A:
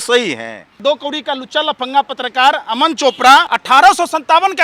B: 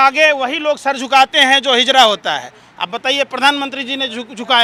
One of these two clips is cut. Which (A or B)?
A